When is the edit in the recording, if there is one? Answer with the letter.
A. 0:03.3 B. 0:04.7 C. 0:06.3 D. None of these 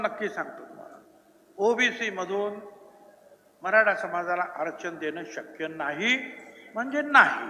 D